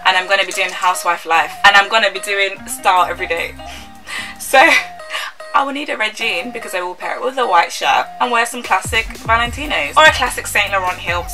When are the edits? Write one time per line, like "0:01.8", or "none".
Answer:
none